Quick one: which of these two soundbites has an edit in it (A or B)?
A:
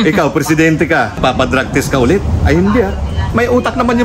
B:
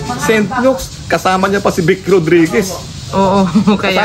A